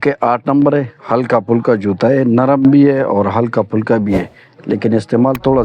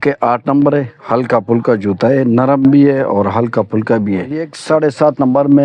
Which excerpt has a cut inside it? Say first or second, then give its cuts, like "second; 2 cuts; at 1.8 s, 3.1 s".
second; 1 cut; at 4.5 s